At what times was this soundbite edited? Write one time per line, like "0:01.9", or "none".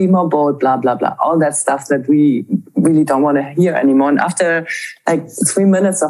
none